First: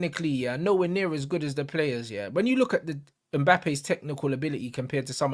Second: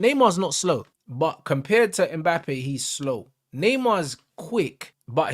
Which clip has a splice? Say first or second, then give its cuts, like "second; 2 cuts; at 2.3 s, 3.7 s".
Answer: second; 1 cut; at 1.0 s